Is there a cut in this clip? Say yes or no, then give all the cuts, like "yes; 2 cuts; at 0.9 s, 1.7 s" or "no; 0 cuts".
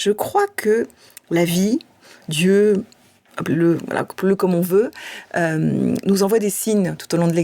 no; 0 cuts